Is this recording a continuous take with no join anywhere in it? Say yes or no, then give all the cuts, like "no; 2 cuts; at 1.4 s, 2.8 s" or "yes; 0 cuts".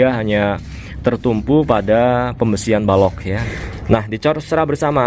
no; 1 cut; at 3.4 s